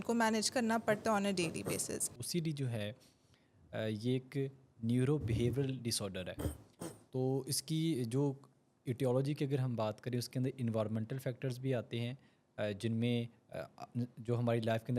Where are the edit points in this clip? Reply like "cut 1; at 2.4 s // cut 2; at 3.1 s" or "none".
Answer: cut 1; at 2.1 s